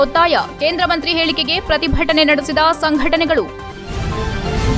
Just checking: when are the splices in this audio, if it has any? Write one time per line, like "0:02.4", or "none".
0:03.6